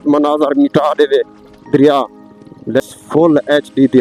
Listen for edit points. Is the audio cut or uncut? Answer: cut